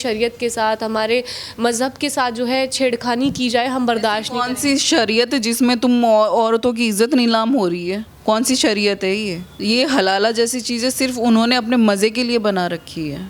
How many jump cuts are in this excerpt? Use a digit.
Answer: 2